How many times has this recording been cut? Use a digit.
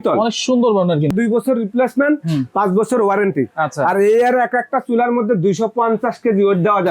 1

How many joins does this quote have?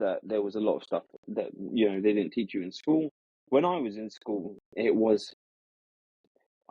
1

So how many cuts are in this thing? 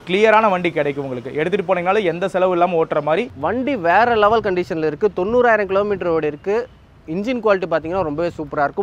1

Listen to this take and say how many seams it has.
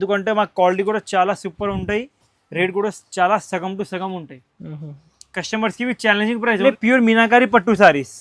1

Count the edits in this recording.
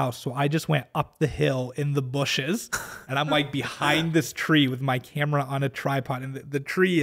0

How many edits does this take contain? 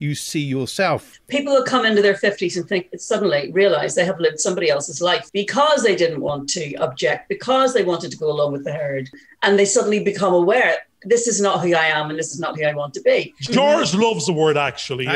4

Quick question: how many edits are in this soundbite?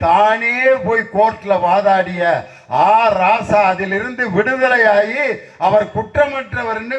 0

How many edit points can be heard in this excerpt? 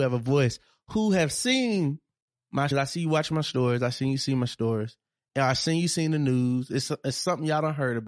1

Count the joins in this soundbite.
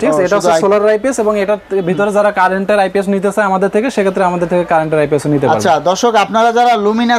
0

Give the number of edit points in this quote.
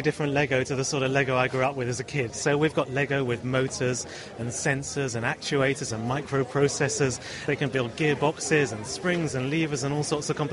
2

